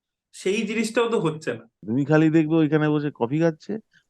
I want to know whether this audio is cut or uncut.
cut